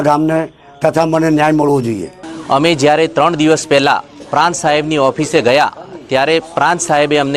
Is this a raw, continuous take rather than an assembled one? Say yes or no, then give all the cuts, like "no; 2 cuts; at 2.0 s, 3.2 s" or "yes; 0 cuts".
yes; 0 cuts